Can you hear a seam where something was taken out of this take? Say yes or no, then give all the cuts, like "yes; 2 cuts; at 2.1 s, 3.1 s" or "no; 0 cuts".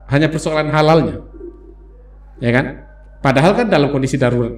no; 0 cuts